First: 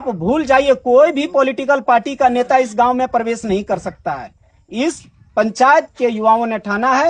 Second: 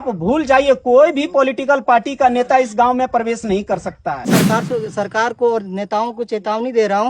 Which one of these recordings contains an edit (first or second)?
second